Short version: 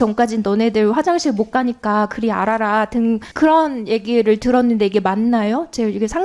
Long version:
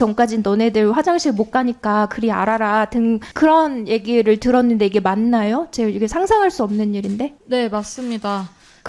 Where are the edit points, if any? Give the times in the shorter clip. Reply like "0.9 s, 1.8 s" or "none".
none